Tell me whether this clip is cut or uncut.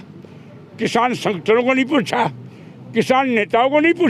uncut